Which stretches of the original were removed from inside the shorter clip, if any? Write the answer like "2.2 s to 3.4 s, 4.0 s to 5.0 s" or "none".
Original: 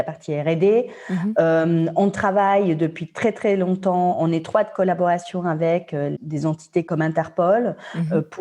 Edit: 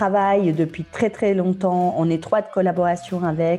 none